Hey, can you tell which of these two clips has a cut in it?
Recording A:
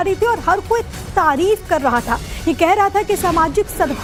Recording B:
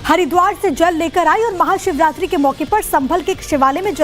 B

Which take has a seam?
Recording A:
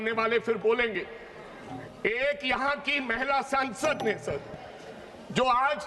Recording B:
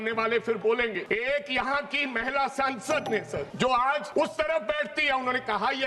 B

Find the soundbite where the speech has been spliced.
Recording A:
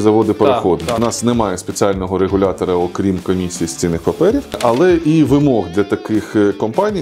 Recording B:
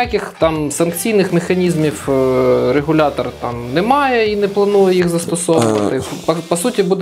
A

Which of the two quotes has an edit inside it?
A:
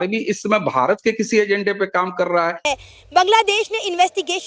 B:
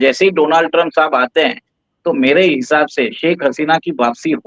A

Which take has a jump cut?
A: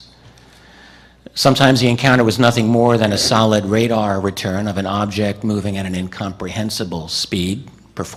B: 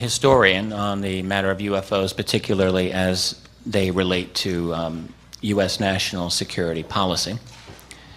B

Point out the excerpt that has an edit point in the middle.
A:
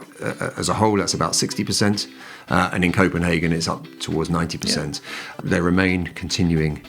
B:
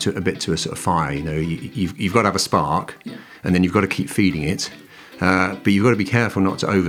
A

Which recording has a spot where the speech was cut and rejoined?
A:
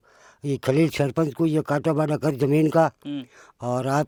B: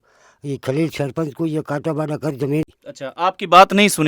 B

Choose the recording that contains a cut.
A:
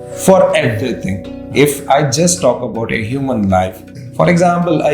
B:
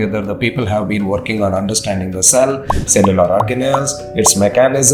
A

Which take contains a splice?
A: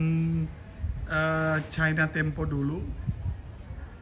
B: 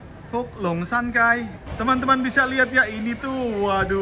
B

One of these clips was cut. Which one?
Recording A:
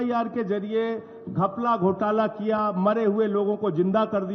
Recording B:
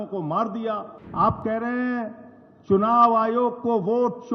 B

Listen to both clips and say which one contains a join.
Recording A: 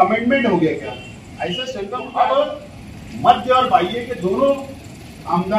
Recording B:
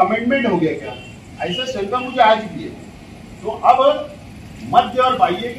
A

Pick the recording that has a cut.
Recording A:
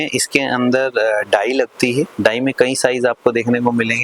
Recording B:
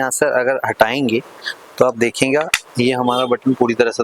A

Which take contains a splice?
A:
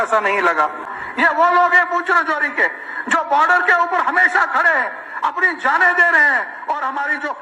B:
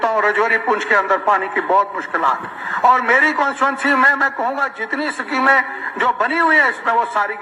A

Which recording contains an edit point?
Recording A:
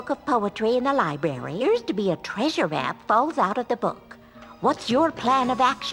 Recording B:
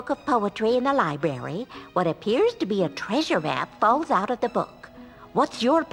A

